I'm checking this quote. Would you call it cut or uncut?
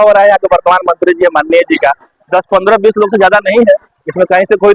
uncut